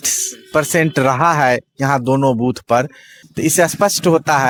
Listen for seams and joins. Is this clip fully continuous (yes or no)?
yes